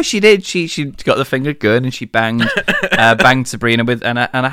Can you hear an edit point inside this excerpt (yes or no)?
no